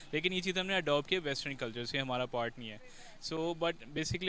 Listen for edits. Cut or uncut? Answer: uncut